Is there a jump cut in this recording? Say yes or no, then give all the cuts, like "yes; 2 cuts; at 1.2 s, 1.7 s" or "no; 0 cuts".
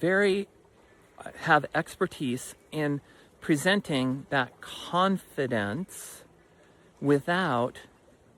no; 0 cuts